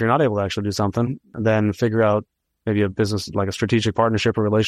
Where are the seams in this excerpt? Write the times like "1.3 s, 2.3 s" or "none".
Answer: 1.3 s